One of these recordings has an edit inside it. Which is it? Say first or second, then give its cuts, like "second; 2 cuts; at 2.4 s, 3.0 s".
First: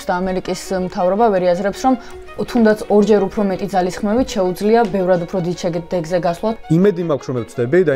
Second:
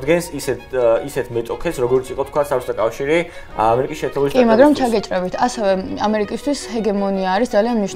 first; 1 cut; at 6.6 s